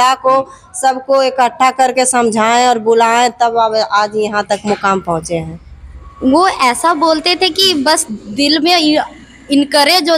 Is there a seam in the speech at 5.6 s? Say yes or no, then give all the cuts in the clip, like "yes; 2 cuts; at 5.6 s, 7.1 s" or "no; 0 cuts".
yes; 1 cut; at 5.6 s